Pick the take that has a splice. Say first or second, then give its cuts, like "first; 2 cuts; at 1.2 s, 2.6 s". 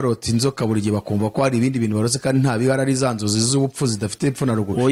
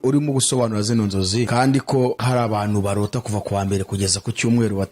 second; 2 cuts; at 1.5 s, 2.2 s